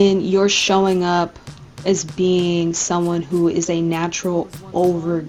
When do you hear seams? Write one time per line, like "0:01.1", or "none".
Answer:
none